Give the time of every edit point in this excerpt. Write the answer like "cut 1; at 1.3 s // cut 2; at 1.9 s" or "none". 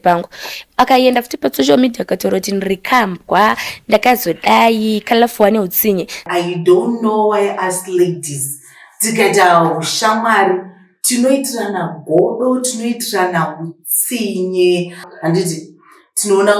cut 1; at 6.3 s // cut 2; at 15.1 s